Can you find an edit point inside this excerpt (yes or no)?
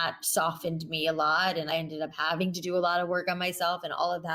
yes